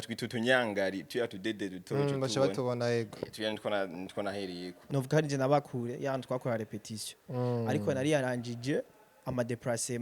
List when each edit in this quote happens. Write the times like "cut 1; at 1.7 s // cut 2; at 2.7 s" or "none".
cut 1; at 4.8 s

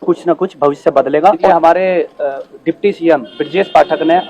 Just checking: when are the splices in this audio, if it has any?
cut 1; at 1.5 s

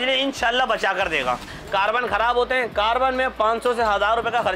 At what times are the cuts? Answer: cut 1; at 1.5 s

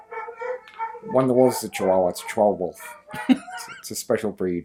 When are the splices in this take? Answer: none

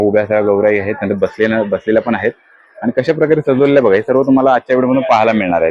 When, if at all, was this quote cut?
none

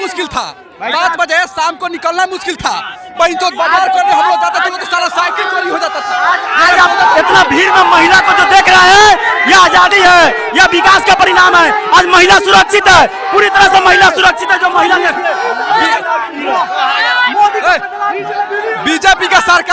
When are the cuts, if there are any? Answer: none

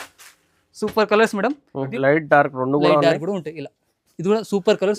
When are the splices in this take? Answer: cut 1; at 1.9 s

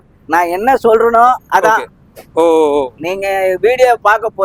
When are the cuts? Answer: none

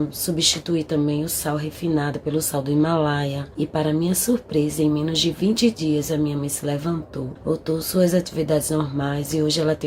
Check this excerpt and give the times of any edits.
cut 1; at 3.4 s // cut 2; at 7.3 s

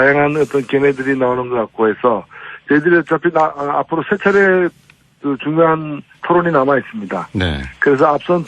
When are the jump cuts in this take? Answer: cut 1; at 7.5 s

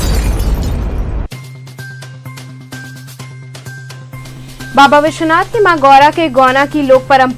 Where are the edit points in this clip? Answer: none

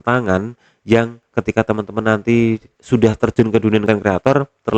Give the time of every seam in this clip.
cut 1; at 1.2 s // cut 2; at 2.7 s // cut 3; at 3.8 s

